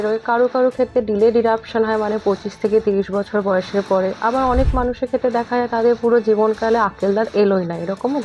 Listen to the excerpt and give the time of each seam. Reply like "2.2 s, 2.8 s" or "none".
none